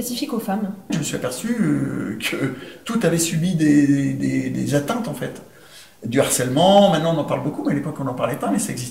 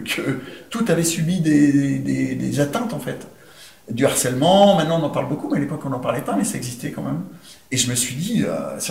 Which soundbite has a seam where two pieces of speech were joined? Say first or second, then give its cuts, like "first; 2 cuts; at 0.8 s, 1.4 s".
first; 1 cut; at 0.9 s